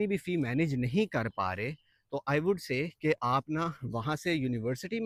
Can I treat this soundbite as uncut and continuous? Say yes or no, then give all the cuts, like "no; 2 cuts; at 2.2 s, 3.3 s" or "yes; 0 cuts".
yes; 0 cuts